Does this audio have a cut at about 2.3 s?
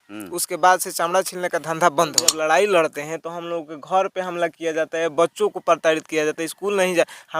yes; 1 cut; at 2.3 s

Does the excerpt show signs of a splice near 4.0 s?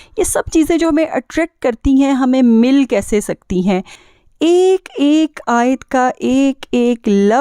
yes; 1 cut; at 4.0 s

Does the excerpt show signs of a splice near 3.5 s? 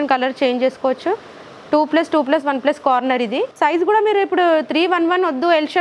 yes; 1 cut; at 3.5 s

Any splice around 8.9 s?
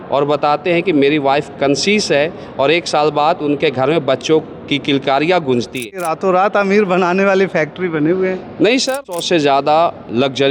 yes; 2 cuts; at 6.1 s, 8.9 s

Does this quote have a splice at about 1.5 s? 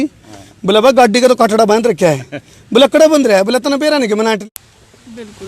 no; 1 cut; at 4.4 s

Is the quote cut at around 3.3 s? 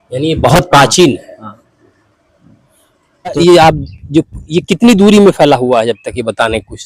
yes; 1 cut; at 3.3 s

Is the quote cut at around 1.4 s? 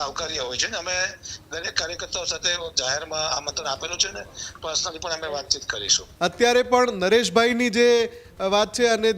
no; 1 cut; at 6.0 s

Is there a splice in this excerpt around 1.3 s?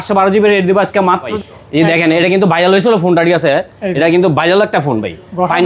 yes; 1 cut; at 1.3 s

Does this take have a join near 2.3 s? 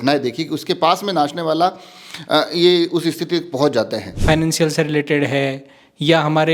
no; 1 cut; at 4.1 s

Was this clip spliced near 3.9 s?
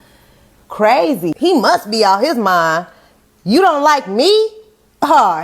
no; 1 cut; at 1.3 s

